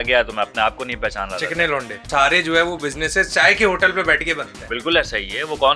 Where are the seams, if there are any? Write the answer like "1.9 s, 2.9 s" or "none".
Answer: 2.1 s